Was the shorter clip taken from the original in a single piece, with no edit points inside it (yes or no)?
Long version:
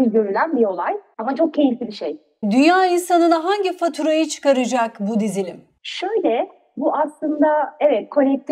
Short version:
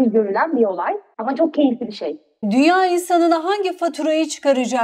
yes